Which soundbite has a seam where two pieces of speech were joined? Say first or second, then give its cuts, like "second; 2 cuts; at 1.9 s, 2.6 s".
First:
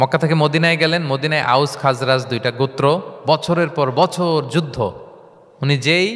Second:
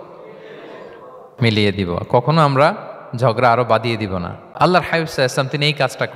second; 2 cuts; at 1.2 s, 4.4 s